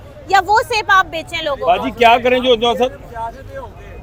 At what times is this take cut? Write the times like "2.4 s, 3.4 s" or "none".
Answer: none